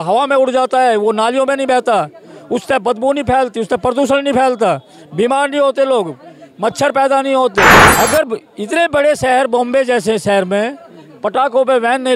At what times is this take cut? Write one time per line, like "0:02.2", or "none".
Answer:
0:07.8